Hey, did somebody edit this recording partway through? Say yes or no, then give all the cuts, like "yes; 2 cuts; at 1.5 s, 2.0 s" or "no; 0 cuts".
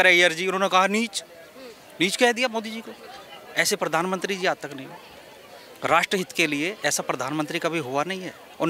no; 0 cuts